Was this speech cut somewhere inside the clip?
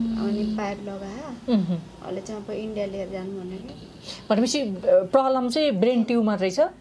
no; 0 cuts

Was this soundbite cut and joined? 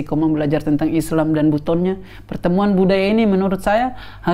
no; 0 cuts

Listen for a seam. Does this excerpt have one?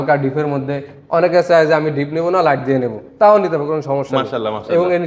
no; 0 cuts

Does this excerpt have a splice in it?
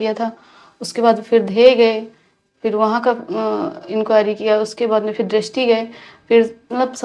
no; 0 cuts

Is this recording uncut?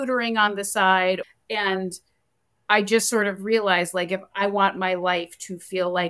no; 1 cut; at 1.2 s

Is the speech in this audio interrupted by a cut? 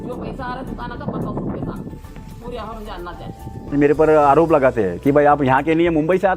yes; 1 cut; at 3.7 s

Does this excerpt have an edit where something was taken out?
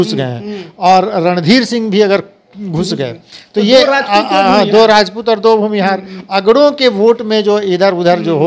no; 0 cuts

